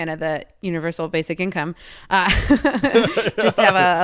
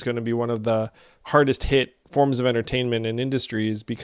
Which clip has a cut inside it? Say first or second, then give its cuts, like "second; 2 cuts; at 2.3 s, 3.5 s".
second; 1 cut; at 2.0 s